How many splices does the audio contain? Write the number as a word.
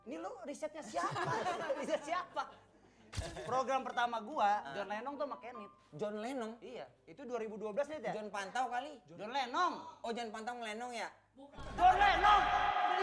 one